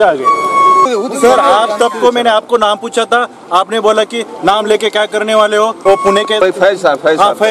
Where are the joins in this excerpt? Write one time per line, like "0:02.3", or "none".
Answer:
0:00.9
0:05.8